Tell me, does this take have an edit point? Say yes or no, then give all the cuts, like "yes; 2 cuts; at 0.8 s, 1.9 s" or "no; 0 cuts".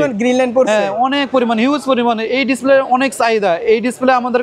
no; 0 cuts